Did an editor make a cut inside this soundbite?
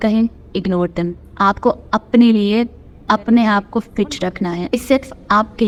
no; 0 cuts

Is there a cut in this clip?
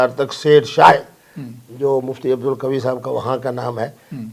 no; 0 cuts

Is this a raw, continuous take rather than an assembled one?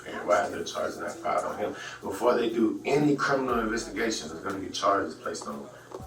yes; 0 cuts

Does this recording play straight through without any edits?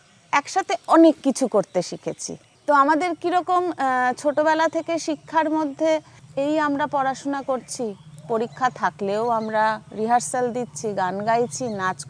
yes; 0 cuts

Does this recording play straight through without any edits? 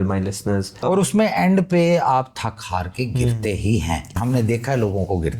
no; 2 cuts; at 0.8 s, 4.1 s

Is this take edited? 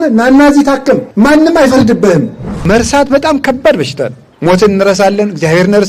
yes; 3 cuts; at 1.1 s, 2.6 s, 4.2 s

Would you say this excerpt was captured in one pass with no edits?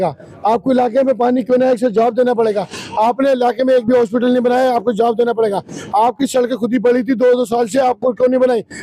yes; 0 cuts

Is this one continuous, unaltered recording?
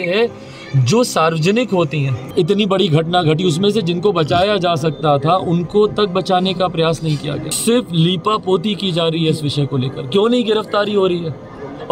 no; 2 cuts; at 2.2 s, 7.5 s

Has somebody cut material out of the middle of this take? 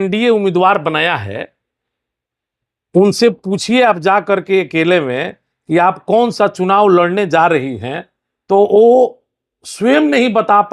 no; 0 cuts

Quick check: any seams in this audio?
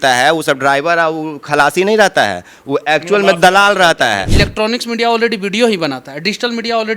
yes; 1 cut; at 4.2 s

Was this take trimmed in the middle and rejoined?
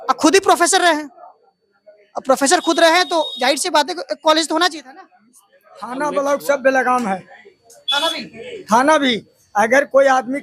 yes; 1 cut; at 5.9 s

